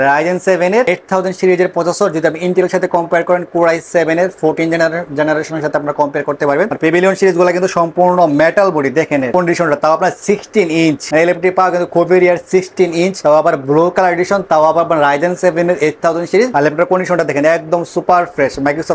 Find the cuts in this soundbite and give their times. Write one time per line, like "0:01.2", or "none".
none